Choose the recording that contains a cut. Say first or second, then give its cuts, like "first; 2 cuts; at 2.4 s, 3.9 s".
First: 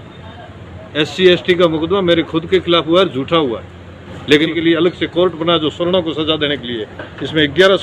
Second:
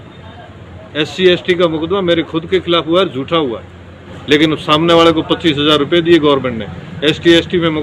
first; 1 cut; at 4.5 s